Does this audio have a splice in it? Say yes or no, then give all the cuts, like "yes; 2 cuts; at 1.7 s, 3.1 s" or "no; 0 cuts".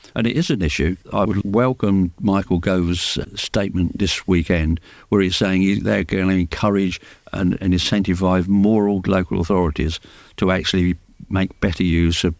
yes; 2 cuts; at 1.0 s, 3.1 s